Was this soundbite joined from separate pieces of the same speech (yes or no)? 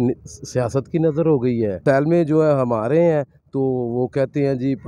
yes